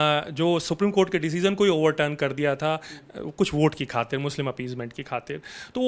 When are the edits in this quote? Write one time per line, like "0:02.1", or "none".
none